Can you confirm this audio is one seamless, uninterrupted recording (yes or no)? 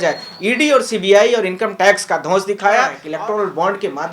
no